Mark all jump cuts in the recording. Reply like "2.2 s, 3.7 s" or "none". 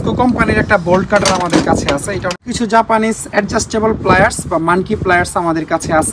2.4 s